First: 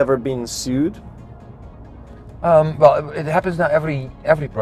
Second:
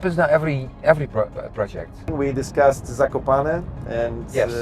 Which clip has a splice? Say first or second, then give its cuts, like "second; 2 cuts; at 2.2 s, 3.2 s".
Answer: second; 1 cut; at 2.1 s